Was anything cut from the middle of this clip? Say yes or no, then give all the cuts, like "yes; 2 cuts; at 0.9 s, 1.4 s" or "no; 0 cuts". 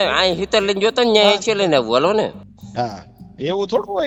no; 0 cuts